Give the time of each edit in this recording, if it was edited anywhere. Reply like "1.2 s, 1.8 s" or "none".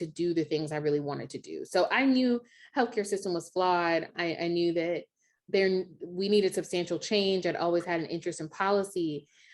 4.1 s, 5.3 s